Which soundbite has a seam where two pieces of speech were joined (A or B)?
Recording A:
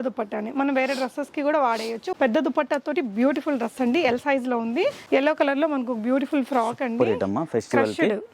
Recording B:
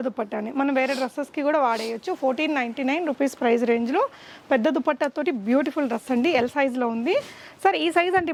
A